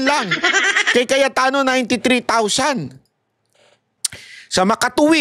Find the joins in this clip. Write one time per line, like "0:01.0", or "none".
0:03.9